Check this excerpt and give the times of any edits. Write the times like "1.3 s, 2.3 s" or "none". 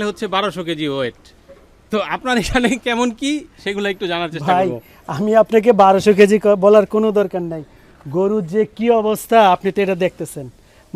none